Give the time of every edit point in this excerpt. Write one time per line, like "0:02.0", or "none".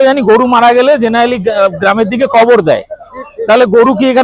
none